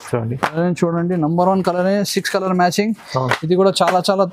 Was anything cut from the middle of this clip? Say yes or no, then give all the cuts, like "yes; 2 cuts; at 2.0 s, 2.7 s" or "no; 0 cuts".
no; 0 cuts